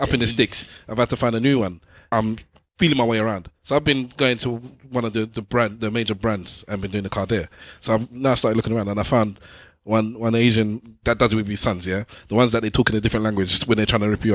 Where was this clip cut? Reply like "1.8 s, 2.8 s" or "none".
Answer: 2.0 s, 7.6 s, 11.0 s